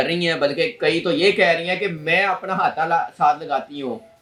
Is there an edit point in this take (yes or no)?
no